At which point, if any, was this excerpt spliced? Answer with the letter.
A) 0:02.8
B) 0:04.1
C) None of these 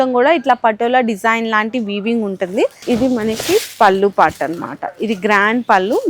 A